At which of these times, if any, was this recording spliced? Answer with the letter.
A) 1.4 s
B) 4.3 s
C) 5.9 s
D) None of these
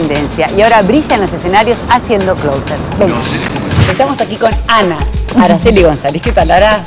B